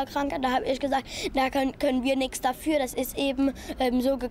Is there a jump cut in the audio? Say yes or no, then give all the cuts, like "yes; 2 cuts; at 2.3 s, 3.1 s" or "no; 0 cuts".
no; 0 cuts